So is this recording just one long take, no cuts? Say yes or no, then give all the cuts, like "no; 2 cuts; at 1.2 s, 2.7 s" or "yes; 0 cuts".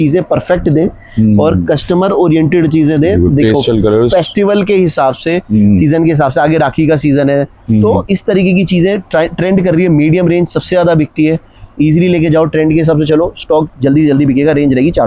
yes; 0 cuts